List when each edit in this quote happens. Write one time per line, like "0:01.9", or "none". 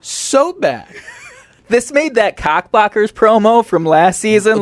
0:01.5